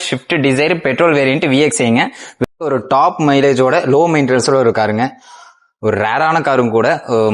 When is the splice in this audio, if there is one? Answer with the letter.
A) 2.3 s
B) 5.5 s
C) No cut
A